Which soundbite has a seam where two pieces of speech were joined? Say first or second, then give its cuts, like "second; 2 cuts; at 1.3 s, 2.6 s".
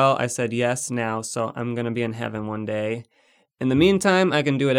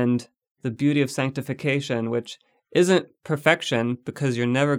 first; 1 cut; at 3.4 s